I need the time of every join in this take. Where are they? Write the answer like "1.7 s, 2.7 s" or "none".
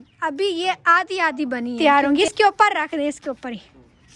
1.8 s